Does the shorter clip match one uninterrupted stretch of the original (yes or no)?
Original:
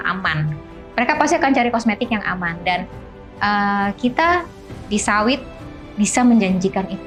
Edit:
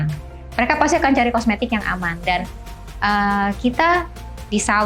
yes